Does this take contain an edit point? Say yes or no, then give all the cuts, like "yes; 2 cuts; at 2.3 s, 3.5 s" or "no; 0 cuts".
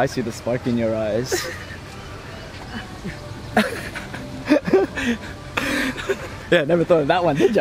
no; 0 cuts